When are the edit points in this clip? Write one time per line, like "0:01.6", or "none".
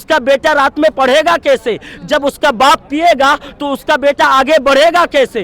none